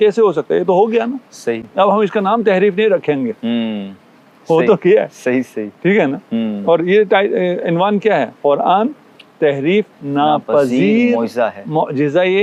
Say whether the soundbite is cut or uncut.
uncut